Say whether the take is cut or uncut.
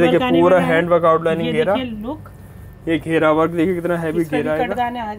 uncut